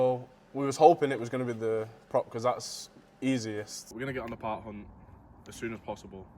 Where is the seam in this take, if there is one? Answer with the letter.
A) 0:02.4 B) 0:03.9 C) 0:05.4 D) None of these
B